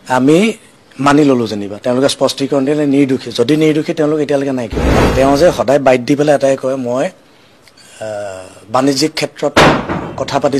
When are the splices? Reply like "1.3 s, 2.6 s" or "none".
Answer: 5.0 s